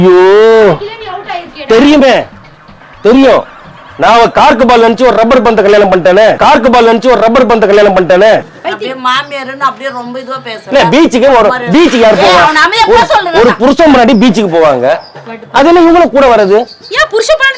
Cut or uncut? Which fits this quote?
cut